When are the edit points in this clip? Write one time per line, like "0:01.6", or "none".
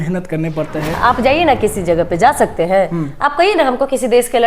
0:00.9